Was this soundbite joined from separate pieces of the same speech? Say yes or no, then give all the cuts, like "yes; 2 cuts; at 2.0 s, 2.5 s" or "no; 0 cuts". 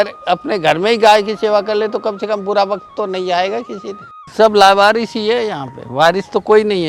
yes; 1 cut; at 4.2 s